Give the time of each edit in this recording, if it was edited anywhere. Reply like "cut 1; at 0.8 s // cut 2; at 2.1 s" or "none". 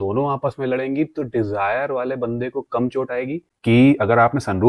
cut 1; at 3.4 s